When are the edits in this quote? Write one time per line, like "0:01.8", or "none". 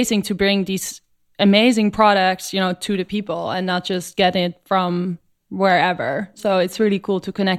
none